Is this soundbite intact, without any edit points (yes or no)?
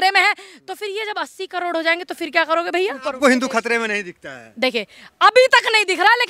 no